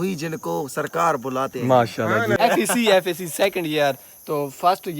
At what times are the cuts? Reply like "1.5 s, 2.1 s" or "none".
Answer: 2.4 s